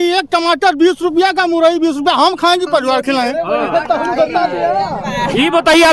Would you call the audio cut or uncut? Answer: uncut